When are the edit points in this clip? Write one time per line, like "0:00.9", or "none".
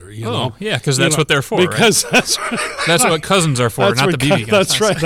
none